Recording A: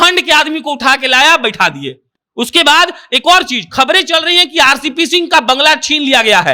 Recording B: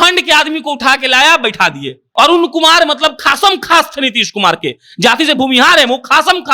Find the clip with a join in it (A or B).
B